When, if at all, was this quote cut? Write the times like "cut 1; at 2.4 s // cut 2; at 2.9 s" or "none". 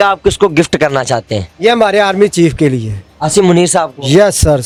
none